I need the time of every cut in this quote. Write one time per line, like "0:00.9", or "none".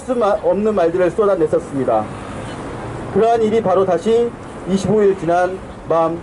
0:04.6